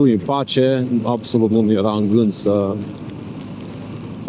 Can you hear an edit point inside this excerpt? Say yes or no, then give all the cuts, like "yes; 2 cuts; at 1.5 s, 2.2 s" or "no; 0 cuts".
no; 0 cuts